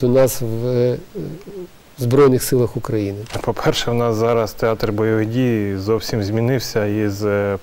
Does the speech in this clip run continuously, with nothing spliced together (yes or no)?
no